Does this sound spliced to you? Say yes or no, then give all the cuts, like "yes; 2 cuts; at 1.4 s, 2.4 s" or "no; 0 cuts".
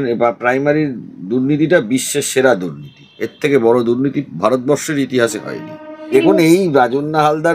yes; 1 cut; at 6.1 s